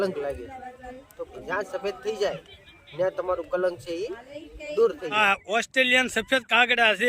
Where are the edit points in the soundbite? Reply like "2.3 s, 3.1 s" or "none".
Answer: 1.3 s, 5.2 s